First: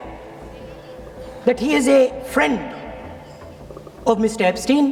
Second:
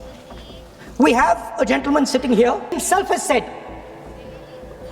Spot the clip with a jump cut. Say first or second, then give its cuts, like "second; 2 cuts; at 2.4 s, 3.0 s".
second; 1 cut; at 2.7 s